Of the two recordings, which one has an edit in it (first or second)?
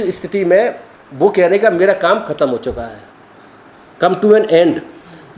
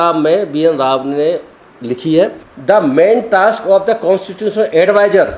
second